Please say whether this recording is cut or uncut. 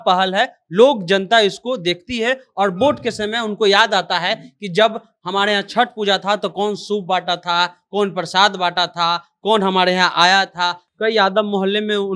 cut